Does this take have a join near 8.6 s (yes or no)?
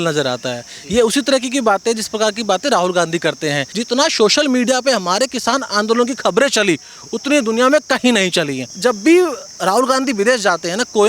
yes